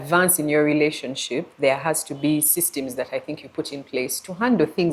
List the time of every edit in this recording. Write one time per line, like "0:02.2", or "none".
none